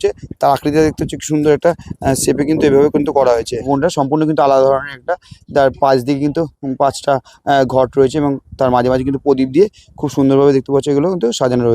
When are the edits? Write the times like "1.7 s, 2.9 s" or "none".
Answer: 3.7 s